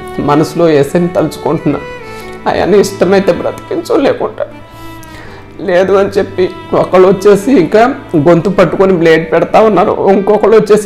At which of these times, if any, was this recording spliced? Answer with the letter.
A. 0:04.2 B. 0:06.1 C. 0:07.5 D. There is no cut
D